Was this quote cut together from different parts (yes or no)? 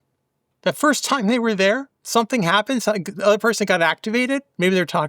yes